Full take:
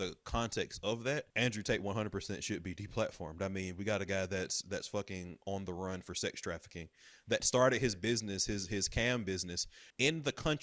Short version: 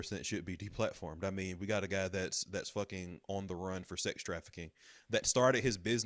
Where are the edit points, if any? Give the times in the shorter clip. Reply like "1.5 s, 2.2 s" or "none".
none